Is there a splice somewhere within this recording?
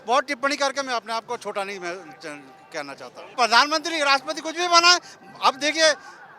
yes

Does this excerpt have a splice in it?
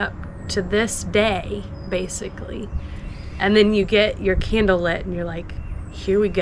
no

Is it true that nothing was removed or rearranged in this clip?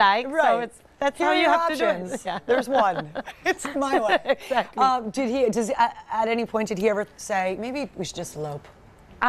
yes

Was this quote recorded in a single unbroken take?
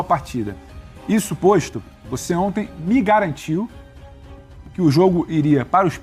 yes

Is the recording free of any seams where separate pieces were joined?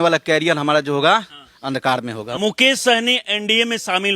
no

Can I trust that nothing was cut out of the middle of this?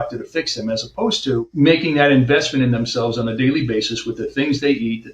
no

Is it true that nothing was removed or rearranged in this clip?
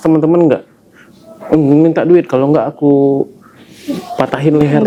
yes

